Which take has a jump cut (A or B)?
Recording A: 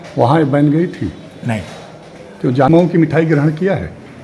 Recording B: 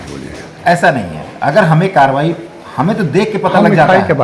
A